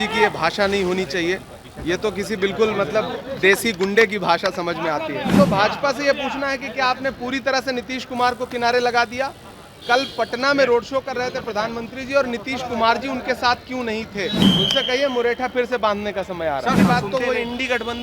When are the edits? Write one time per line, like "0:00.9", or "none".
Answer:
0:05.3
0:14.4
0:16.8